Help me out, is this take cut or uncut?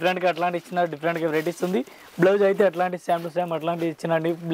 uncut